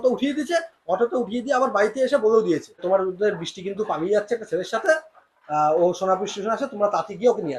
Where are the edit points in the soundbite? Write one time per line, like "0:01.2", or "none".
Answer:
0:02.8